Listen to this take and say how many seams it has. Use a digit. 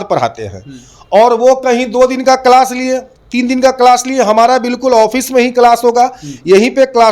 0